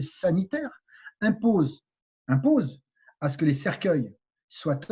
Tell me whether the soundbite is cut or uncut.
uncut